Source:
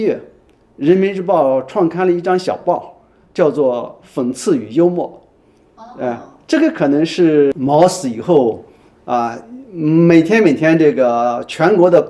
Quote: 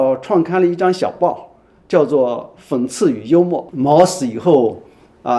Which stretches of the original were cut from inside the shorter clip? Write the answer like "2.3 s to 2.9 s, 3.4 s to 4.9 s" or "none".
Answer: 5.2 s to 7.6 s